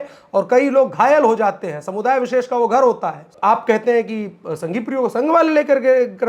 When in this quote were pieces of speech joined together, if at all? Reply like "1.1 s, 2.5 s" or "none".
3.3 s

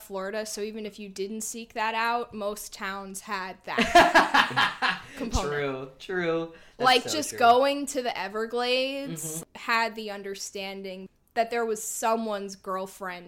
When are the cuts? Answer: 9.4 s, 11.1 s

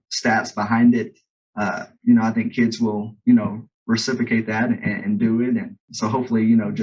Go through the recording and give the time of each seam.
5.8 s

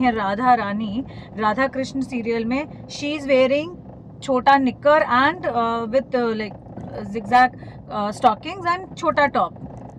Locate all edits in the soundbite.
none

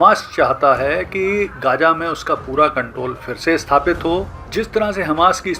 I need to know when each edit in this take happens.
4.4 s

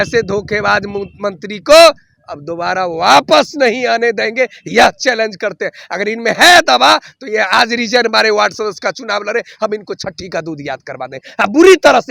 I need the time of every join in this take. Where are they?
none

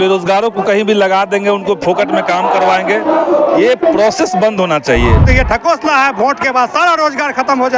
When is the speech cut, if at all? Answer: 5.2 s

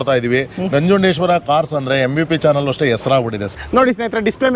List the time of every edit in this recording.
3.5 s

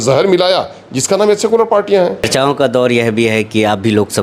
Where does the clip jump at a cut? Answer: 2.3 s

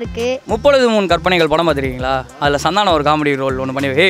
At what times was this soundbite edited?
none

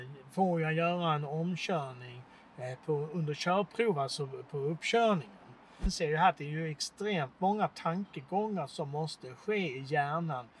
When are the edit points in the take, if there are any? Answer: 5.9 s

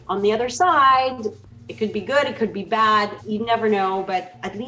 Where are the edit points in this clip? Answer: 3.2 s

